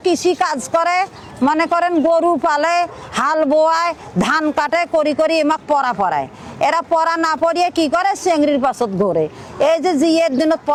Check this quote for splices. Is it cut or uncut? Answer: uncut